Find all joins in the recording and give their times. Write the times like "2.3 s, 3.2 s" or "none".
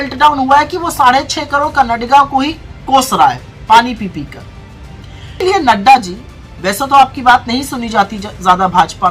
5.4 s